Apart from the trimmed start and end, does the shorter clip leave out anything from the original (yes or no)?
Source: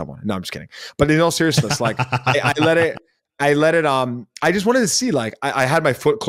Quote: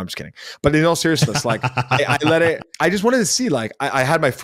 yes